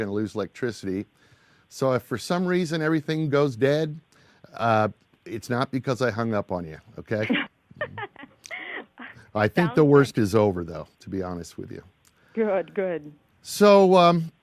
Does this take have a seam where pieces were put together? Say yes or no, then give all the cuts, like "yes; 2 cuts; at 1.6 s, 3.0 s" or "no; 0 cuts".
yes; 1 cut; at 9.6 s